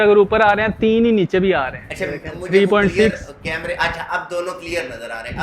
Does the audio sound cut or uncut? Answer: uncut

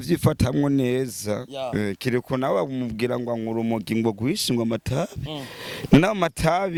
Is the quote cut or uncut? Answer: uncut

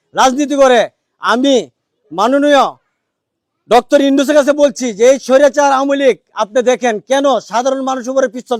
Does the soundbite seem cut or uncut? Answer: uncut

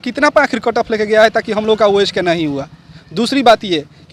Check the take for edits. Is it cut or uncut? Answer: uncut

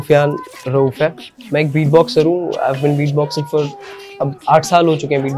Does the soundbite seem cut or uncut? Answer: uncut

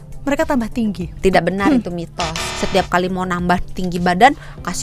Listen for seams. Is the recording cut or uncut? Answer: cut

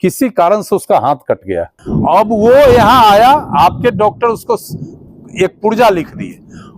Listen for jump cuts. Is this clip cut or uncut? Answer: cut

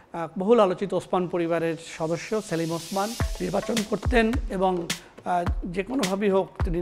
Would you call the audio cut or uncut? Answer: cut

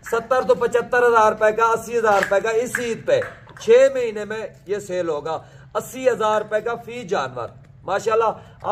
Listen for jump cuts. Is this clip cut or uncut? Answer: uncut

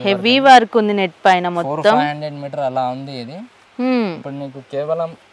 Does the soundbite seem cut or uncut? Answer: uncut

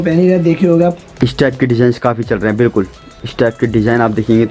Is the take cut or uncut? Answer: uncut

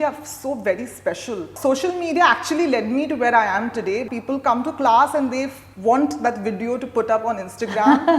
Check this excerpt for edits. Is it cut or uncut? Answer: cut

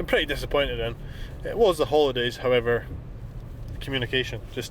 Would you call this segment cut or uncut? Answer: uncut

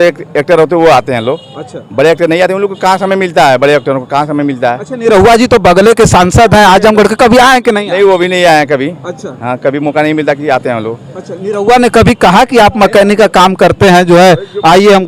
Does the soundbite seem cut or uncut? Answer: uncut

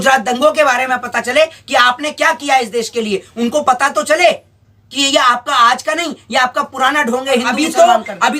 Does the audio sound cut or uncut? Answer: cut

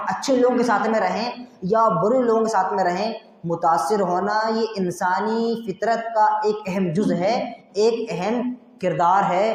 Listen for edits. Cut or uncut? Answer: uncut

